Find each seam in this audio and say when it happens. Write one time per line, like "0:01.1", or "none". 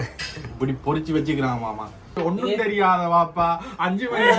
0:02.2